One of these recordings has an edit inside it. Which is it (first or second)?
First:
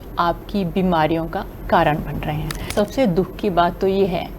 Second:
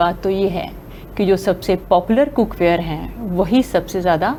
first